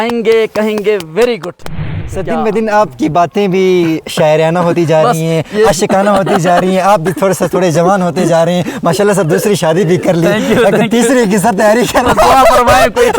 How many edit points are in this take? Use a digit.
1